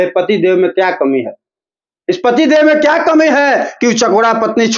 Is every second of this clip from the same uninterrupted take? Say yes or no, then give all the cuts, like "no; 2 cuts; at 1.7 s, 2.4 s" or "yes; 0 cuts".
yes; 0 cuts